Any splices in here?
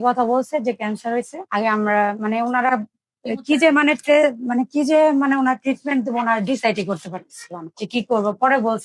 no; 0 cuts

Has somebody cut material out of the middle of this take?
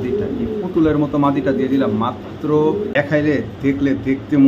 yes; 1 cut; at 2.9 s

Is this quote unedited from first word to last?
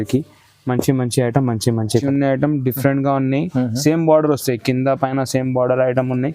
no; 1 cut; at 2.0 s

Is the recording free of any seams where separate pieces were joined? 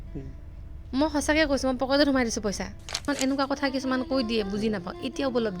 no; 1 cut; at 3.0 s

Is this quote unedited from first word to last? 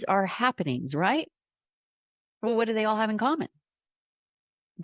yes; 0 cuts

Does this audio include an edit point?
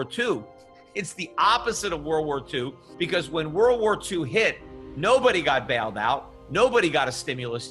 yes; 1 cut; at 2.8 s

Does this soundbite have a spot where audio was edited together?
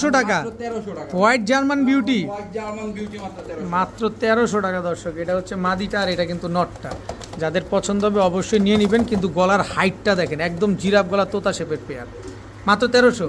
no; 0 cuts

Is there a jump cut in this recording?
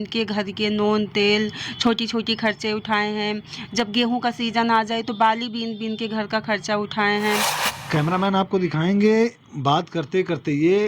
yes; 1 cut; at 7.7 s

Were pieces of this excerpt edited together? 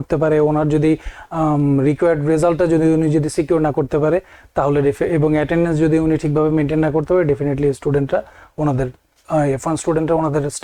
no; 0 cuts

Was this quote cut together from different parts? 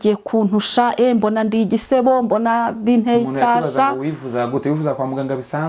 no; 0 cuts

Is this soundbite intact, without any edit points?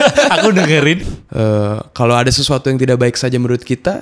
no; 1 cut; at 1.1 s

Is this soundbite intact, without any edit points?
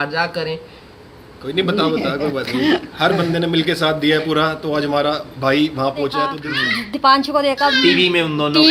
no; 1 cut; at 6.4 s

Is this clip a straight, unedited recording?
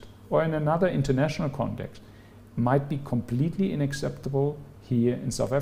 yes; 0 cuts

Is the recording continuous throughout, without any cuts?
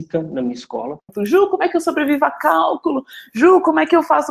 no; 1 cut; at 1.1 s

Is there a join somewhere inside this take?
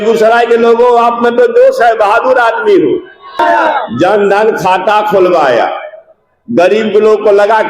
yes; 1 cut; at 3.4 s

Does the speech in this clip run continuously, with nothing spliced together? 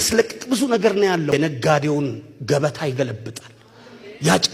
no; 1 cut; at 1.1 s

